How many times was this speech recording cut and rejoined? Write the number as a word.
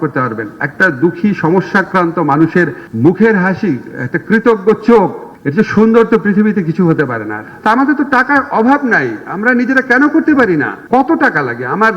two